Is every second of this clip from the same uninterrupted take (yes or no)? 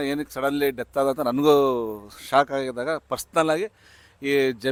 yes